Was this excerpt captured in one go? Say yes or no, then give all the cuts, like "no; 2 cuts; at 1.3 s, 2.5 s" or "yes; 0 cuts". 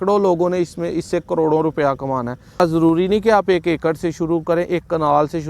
no; 1 cut; at 2.6 s